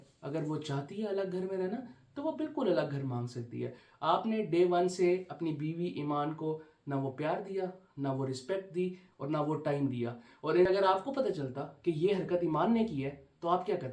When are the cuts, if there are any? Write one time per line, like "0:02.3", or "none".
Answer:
0:03.8
0:10.7